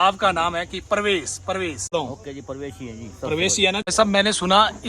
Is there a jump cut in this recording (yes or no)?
yes